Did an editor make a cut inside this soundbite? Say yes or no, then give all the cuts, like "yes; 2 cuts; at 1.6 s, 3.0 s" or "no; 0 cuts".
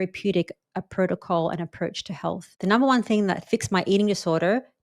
yes; 2 cuts; at 2.5 s, 3.4 s